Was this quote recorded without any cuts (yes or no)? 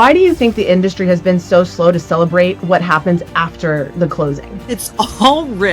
no